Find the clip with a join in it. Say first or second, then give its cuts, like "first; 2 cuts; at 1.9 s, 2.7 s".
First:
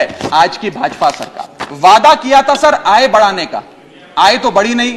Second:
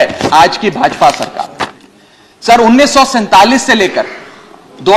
second; 1 cut; at 1.6 s